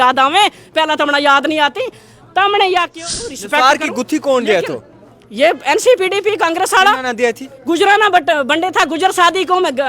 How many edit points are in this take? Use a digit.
1